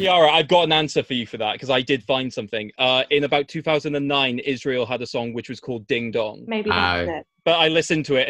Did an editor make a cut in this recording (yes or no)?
yes